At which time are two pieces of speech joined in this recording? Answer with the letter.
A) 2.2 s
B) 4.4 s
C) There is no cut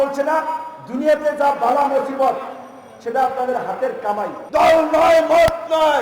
B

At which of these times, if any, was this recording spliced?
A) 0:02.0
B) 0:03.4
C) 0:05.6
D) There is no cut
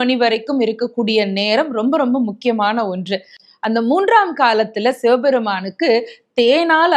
B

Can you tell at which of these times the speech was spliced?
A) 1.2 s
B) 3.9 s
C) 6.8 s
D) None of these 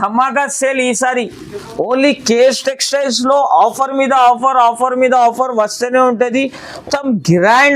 C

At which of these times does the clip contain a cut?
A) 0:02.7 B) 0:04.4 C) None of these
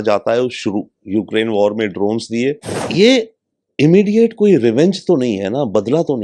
A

